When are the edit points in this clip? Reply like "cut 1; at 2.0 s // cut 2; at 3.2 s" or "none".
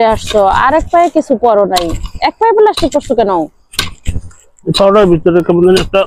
none